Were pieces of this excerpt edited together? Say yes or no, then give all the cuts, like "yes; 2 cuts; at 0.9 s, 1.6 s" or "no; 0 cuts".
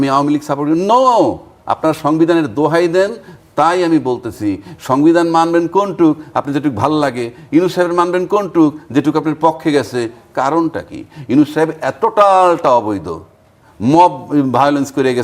no; 0 cuts